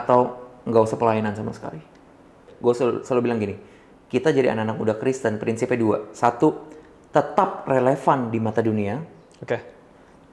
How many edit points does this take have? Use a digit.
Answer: 1